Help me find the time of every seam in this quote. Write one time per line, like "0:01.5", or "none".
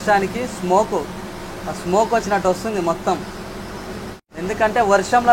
0:04.3